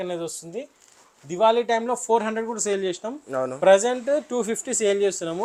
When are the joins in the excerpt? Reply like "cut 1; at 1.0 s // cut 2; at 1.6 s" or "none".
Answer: none